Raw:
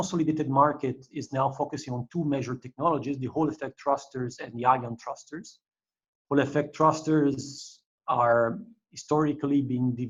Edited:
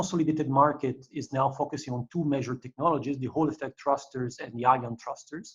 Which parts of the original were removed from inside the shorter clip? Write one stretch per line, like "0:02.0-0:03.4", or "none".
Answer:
none